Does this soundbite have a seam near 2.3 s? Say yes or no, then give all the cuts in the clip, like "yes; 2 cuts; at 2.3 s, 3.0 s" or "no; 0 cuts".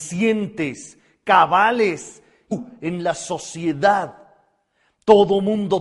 no; 0 cuts